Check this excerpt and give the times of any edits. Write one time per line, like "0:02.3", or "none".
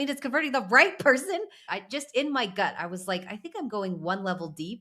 0:01.6

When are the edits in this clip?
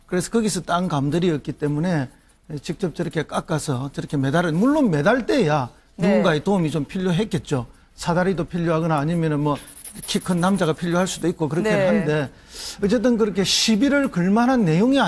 none

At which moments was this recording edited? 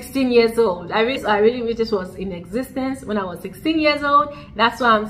0:01.2

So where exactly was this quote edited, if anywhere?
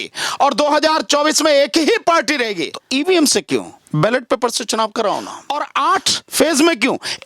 0:02.7
0:05.4

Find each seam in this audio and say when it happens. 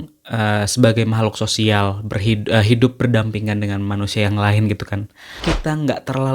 0:05.4

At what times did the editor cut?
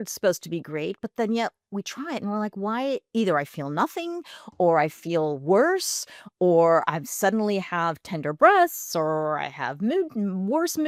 none

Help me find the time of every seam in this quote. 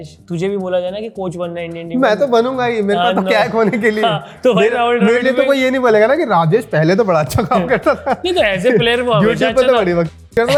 none

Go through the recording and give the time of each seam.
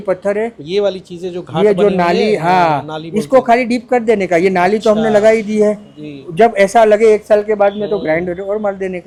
none

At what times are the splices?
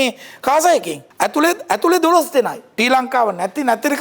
0:01.0
0:02.6

